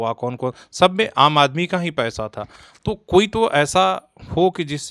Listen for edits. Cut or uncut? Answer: uncut